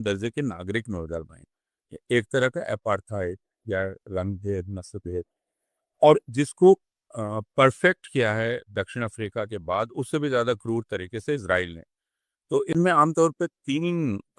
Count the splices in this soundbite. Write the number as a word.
one